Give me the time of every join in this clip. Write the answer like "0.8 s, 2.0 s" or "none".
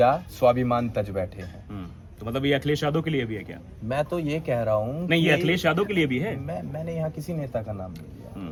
none